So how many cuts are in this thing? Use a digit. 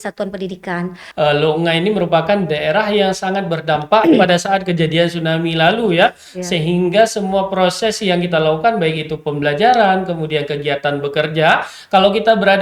1